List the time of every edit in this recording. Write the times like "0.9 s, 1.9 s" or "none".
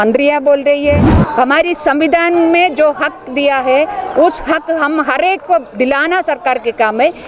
1.1 s